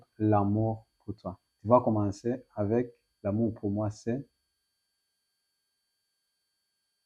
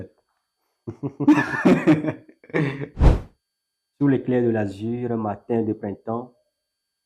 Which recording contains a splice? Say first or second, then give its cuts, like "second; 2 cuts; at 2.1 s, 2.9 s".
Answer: second; 1 cut; at 3.0 s